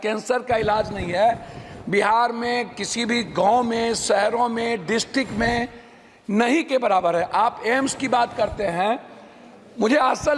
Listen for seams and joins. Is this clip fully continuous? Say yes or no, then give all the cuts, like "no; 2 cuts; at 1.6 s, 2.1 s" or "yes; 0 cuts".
yes; 0 cuts